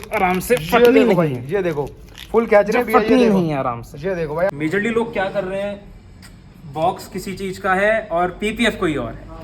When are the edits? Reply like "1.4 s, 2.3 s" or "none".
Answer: 4.5 s